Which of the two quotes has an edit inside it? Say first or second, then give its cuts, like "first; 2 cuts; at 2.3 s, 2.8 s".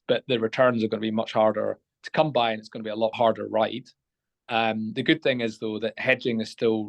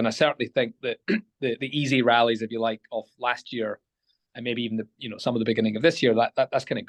first; 1 cut; at 3.1 s